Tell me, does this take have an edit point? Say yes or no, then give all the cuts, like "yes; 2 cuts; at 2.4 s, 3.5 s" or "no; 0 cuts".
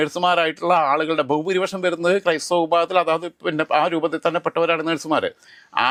no; 0 cuts